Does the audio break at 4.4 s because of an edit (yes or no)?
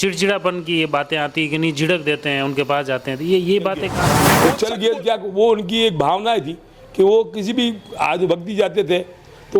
yes